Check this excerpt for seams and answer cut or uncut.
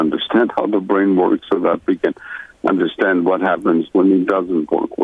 uncut